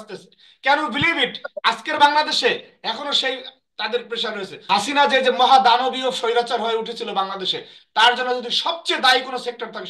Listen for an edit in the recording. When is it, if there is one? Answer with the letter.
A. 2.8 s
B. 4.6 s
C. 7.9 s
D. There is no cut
B